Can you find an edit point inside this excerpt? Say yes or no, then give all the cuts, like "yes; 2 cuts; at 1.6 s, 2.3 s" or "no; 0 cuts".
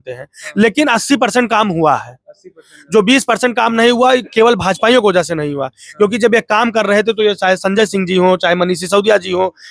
no; 0 cuts